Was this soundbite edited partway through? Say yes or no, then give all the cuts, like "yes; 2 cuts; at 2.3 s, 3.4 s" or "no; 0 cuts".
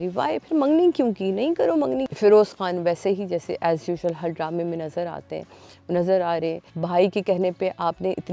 yes; 2 cuts; at 2.1 s, 6.7 s